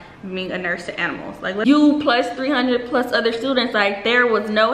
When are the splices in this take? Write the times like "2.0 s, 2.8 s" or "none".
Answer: 1.7 s